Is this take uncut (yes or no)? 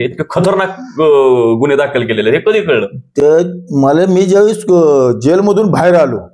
yes